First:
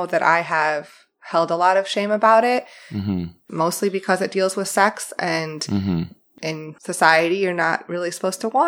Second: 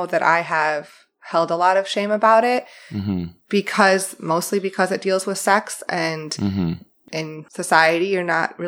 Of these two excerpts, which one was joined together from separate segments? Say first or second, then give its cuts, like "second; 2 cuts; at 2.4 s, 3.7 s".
first; 1 cut; at 3.4 s